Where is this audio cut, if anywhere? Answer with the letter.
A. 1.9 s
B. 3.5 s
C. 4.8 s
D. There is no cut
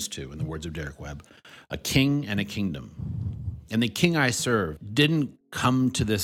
C